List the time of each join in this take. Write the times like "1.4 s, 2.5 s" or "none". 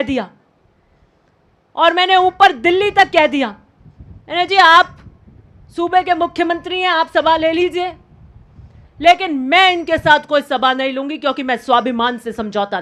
none